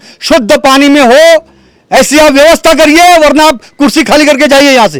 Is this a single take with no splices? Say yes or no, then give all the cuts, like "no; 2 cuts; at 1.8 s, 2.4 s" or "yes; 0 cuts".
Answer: yes; 0 cuts